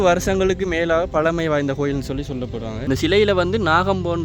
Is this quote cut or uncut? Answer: cut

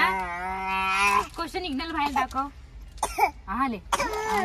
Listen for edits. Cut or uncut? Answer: uncut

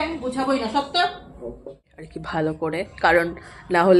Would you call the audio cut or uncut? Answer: cut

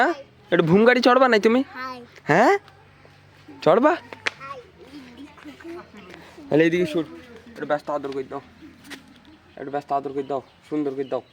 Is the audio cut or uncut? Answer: uncut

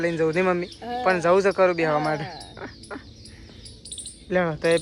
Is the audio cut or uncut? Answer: uncut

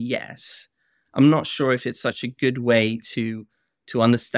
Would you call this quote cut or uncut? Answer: uncut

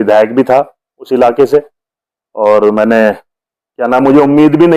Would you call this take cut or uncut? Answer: uncut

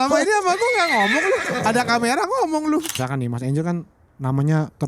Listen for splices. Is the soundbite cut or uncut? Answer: cut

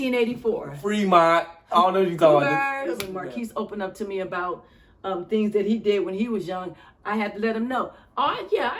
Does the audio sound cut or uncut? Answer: cut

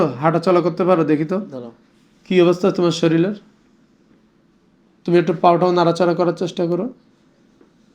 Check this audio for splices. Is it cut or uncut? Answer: uncut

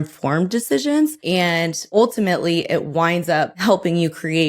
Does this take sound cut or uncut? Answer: cut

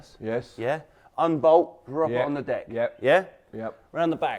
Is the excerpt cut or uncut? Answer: uncut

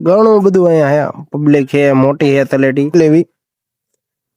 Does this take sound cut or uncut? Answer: cut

